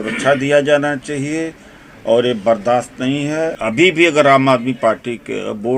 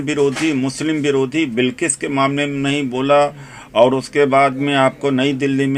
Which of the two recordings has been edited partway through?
first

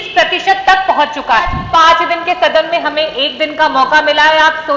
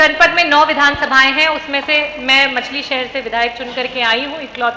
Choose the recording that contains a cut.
first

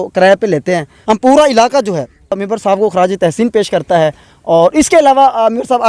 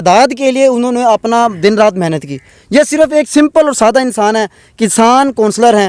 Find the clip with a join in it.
first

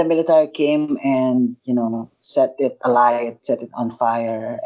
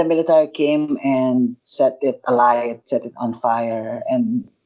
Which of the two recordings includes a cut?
second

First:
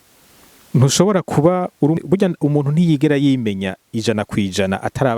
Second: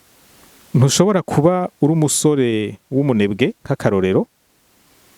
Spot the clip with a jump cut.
first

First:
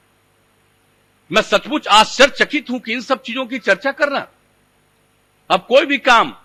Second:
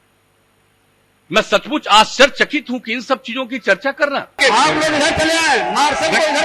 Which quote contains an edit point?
second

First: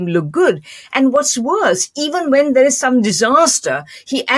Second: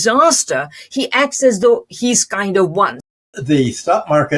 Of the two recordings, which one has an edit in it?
second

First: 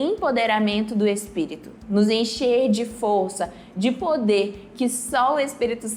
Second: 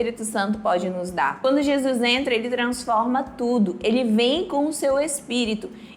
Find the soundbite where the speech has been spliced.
second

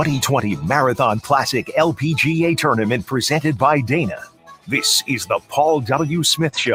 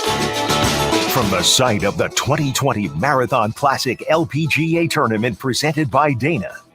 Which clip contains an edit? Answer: second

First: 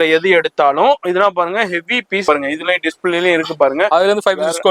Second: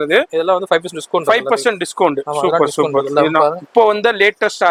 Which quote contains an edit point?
first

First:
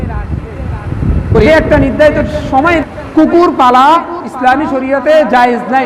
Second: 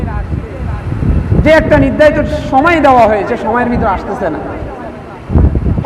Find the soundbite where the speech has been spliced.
first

